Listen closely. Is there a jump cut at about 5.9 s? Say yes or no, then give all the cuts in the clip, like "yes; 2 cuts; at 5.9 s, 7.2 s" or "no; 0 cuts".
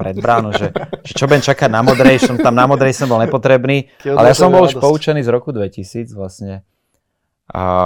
no; 1 cut; at 4.0 s